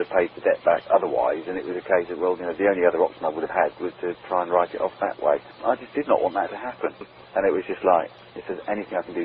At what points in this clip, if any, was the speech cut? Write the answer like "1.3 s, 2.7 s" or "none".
7.1 s, 8.2 s